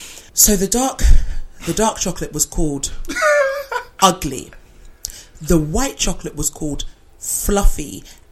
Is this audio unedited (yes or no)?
yes